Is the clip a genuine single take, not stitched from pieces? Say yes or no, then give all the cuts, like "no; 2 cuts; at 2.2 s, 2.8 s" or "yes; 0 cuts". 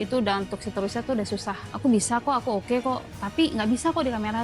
no; 1 cut; at 1.7 s